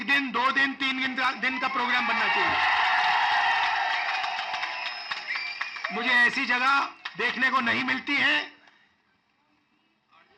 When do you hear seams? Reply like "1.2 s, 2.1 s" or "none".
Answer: none